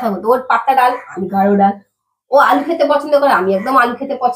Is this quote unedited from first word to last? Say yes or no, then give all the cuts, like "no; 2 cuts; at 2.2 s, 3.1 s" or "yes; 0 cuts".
yes; 0 cuts